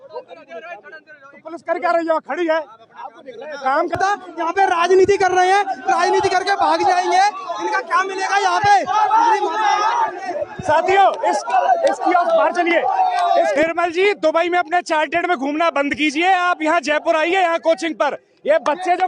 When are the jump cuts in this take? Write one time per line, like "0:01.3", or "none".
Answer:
0:04.0
0:13.5